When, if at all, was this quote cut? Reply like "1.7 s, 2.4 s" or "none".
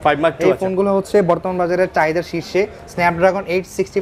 none